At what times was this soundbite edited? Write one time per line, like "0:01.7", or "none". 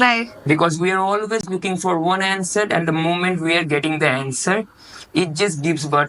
none

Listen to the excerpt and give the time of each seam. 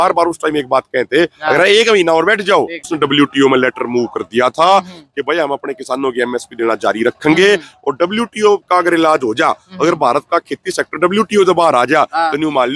0:02.9

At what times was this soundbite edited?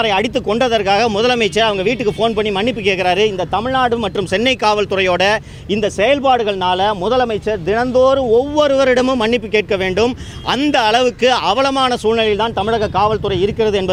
none

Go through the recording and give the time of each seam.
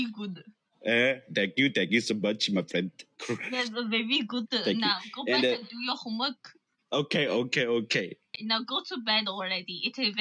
0:08.4

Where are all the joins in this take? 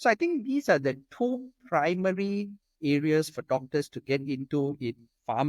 none

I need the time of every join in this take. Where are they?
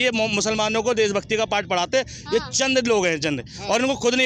none

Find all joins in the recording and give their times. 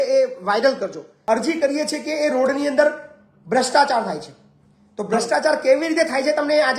0:01.1

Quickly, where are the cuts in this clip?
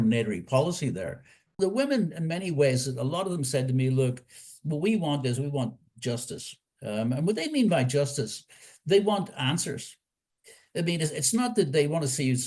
0:01.6

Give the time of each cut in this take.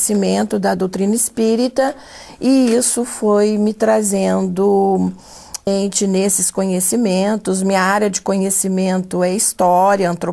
none

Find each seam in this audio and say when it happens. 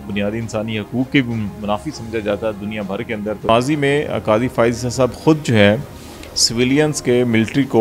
0:03.5

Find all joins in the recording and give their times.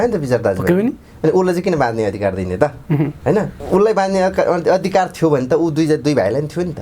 0:03.6

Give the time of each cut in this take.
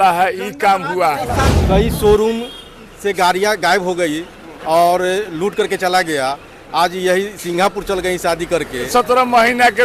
0:01.4
0:08.9

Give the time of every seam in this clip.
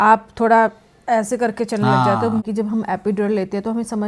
0:02.4

